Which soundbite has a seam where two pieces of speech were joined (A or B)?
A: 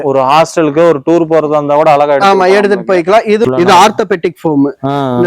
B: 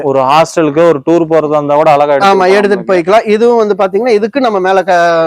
A